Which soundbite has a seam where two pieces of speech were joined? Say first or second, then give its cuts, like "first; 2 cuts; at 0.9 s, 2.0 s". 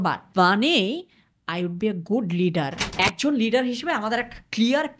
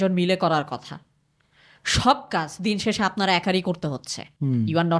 first; 1 cut; at 2.8 s